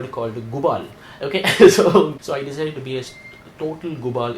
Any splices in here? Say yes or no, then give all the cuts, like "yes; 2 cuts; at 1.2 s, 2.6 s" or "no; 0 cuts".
yes; 1 cut; at 2.2 s